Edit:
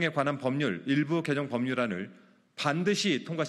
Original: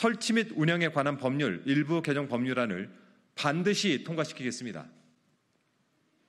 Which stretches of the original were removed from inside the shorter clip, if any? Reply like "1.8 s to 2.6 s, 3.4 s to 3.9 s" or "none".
none

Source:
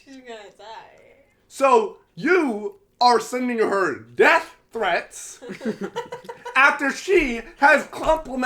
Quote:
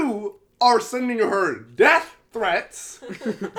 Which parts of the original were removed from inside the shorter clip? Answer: none

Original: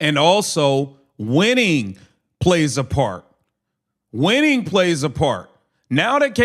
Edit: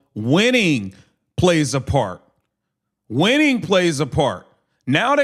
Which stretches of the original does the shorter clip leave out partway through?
none

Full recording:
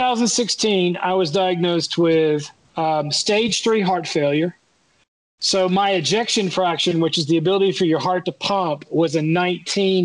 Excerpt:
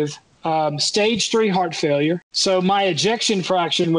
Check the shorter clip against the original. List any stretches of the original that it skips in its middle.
4.6 s to 5.4 s

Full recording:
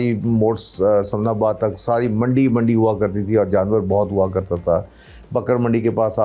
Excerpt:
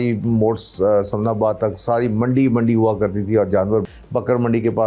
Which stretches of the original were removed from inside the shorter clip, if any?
3.9 s to 5.1 s

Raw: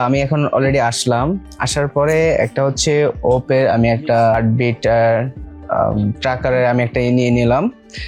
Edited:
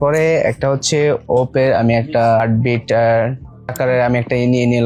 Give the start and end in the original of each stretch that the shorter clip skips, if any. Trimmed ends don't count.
5.7 s to 6.4 s

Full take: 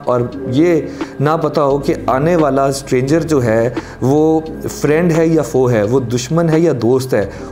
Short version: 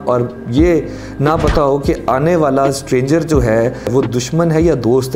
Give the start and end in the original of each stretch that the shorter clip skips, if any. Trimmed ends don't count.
3.9 s to 5.9 s

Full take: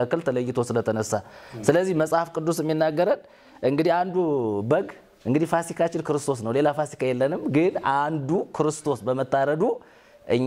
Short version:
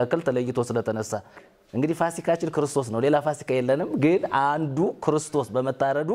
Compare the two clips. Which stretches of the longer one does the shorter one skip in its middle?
1.5 s to 5.0 s

